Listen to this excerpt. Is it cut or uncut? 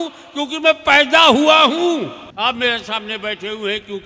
cut